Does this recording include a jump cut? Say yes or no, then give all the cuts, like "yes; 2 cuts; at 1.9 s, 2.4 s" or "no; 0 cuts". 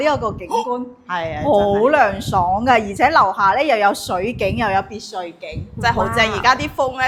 no; 0 cuts